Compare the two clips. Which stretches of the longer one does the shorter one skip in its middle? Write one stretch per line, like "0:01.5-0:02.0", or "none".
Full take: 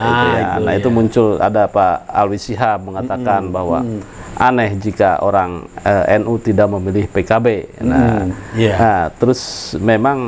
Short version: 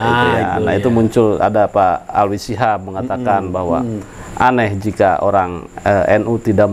none

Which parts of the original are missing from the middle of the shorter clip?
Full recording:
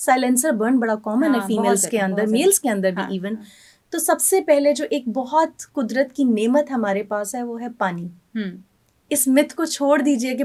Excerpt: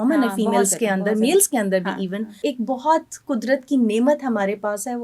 0:03.5-0:04.8

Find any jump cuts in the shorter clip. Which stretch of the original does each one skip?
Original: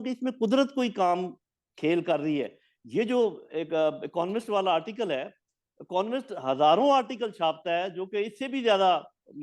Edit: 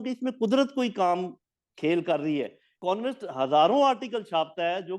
0:02.6-0:05.7

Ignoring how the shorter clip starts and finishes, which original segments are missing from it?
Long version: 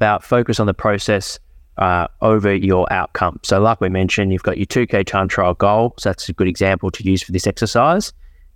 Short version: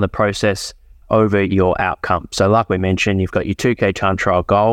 0:01.6-0:02.1

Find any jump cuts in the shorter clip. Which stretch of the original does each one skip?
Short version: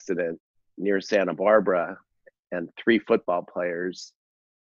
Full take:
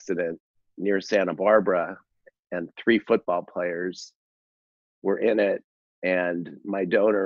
none

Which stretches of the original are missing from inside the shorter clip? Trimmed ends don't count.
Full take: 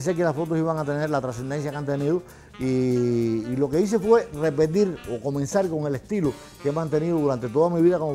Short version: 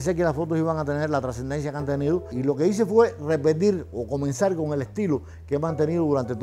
0:02.3-0:03.5

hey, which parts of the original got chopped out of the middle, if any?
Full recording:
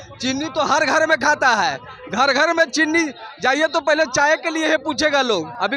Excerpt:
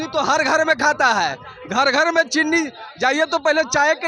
none

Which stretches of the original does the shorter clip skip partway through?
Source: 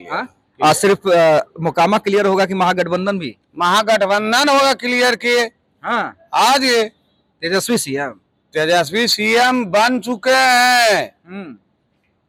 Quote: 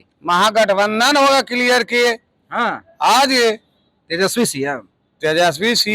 none

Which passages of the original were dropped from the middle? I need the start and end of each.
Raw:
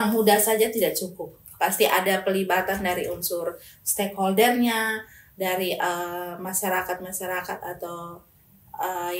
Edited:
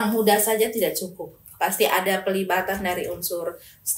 none

